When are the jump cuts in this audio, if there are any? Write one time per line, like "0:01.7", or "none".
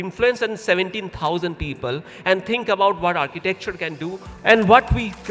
0:04.3